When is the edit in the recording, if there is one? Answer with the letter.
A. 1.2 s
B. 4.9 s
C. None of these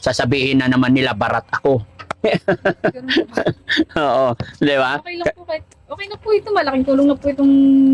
C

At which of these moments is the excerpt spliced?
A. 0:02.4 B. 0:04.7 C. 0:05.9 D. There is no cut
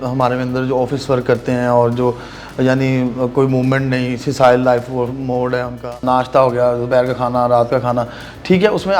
C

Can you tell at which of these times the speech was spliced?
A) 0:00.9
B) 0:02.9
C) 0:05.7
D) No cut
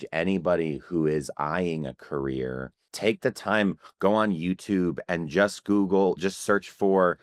B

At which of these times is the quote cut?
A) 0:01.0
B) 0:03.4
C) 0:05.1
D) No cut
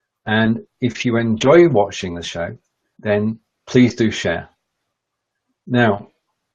B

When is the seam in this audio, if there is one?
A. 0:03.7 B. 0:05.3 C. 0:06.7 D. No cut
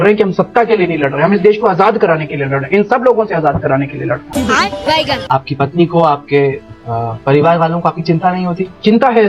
D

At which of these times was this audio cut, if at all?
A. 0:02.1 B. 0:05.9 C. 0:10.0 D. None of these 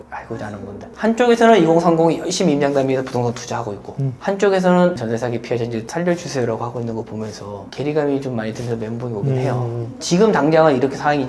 C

